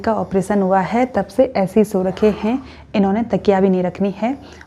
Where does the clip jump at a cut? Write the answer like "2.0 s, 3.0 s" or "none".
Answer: none